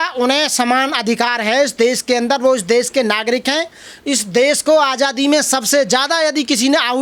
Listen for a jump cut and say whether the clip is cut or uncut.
uncut